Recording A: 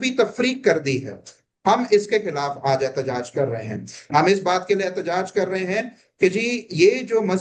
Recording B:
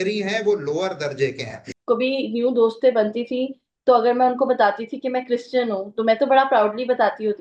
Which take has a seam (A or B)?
B